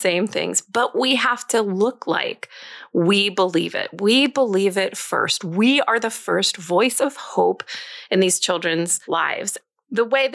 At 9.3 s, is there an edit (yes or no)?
yes